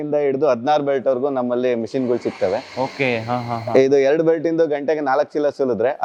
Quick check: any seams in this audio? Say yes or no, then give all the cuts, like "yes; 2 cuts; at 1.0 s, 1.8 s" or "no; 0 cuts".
no; 0 cuts